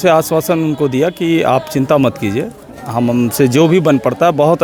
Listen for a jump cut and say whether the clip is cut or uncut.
uncut